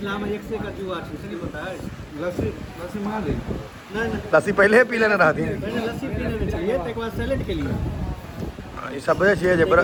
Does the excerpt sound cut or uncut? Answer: uncut